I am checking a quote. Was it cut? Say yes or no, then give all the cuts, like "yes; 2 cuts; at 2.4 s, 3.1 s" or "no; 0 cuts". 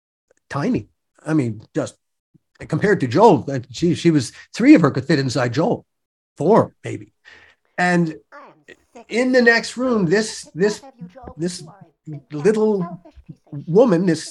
no; 0 cuts